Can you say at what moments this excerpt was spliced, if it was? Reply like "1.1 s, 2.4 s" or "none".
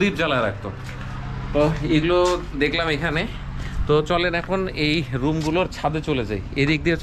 none